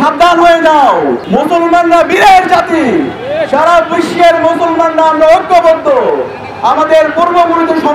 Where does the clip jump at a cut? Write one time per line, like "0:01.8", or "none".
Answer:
0:01.2